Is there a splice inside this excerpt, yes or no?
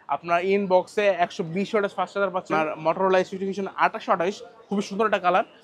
yes